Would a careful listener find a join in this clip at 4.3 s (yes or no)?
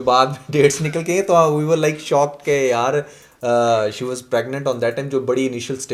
no